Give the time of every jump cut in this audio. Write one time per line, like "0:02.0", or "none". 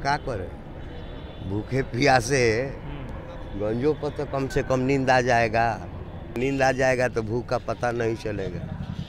0:06.3